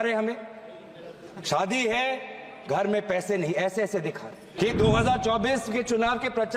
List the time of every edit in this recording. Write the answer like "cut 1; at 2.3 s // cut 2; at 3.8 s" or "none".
cut 1; at 4.5 s